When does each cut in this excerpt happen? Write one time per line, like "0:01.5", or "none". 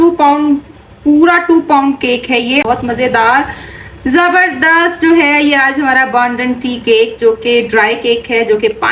0:02.7